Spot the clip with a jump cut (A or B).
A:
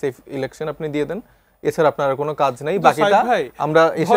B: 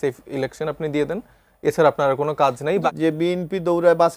B